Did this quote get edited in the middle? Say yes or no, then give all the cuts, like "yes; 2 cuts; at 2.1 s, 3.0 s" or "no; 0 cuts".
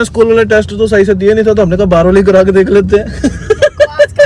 no; 0 cuts